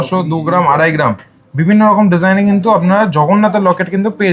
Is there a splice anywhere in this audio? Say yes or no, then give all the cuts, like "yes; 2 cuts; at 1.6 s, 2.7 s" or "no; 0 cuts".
no; 0 cuts